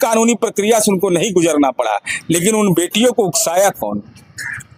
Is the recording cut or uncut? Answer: uncut